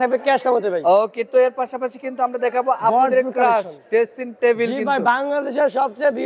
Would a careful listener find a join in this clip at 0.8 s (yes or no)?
no